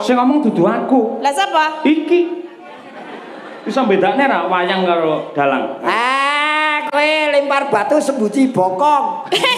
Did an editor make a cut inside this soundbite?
no; 0 cuts

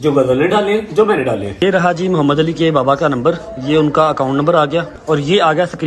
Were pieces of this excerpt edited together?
yes; 2 cuts; at 1.6 s, 4.9 s

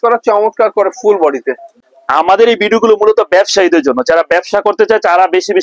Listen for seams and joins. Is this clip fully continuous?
no; 1 cut; at 1.7 s

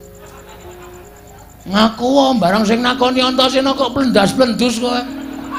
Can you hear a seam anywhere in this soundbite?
no; 0 cuts

